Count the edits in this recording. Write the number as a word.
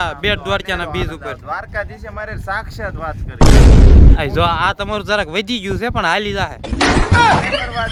zero